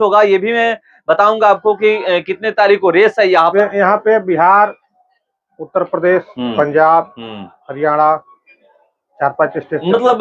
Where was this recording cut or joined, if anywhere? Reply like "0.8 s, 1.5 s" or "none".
3.5 s

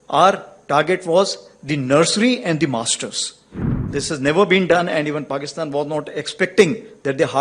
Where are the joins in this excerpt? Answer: 3.9 s

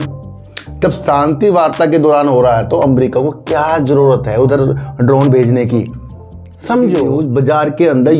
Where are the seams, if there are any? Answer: 7.2 s

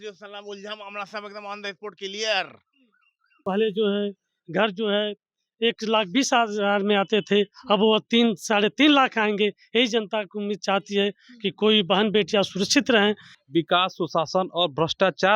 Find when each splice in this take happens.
3.3 s, 13.3 s

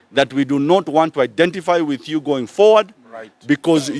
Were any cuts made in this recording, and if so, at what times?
none

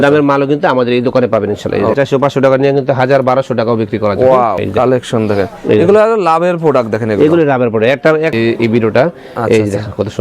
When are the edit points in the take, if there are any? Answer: 2.0 s, 4.6 s, 8.3 s

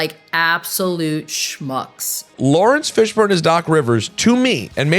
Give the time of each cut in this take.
2.3 s

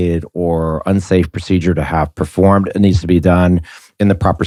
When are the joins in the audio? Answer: none

